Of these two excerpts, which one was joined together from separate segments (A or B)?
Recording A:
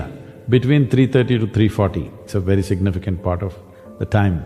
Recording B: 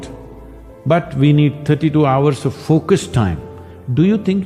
A